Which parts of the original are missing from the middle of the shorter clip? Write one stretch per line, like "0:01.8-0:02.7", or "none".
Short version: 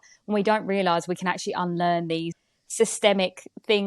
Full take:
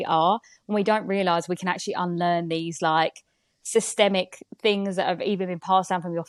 0:02.7-0:03.3